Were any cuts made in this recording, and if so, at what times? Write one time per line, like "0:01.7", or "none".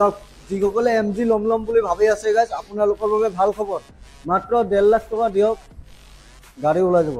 none